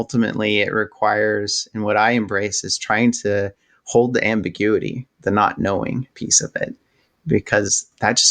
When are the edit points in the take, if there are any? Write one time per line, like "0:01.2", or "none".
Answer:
0:06.4